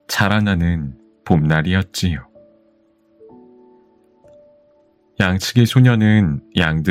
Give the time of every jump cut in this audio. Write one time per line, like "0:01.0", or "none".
0:02.3
0:05.1